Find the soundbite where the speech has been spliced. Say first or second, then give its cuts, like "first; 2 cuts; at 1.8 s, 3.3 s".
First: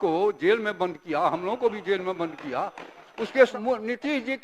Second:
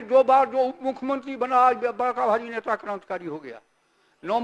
first; 1 cut; at 3.5 s